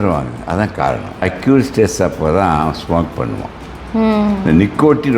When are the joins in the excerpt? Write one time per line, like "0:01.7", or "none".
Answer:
0:01.2